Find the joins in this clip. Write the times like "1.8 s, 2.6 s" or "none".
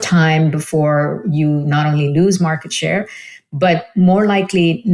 none

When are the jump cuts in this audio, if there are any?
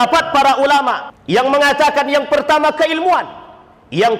1.1 s

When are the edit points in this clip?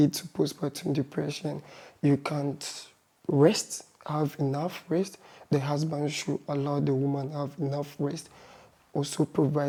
none

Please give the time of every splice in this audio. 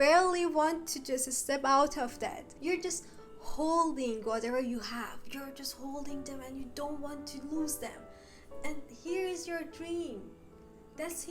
2.5 s

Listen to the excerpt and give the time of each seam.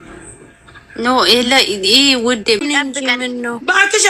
2.6 s

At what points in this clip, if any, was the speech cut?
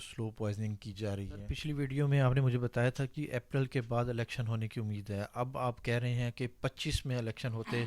1.4 s

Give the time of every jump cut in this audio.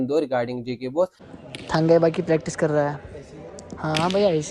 1.2 s

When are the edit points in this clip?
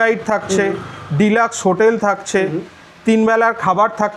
none

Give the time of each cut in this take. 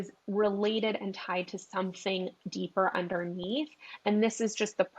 none

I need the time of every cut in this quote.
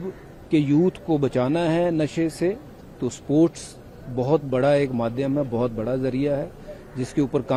none

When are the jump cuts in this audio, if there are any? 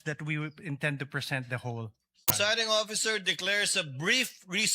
2.2 s

